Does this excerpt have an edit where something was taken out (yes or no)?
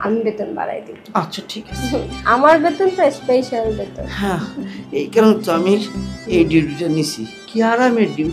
no